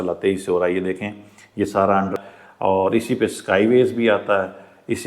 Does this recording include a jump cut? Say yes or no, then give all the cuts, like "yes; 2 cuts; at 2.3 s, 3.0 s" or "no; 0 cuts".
yes; 1 cut; at 2.2 s